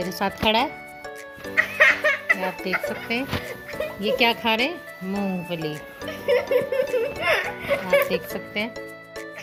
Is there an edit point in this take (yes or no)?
no